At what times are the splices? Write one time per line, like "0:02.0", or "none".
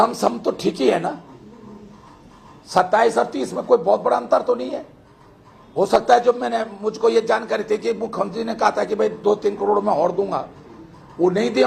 none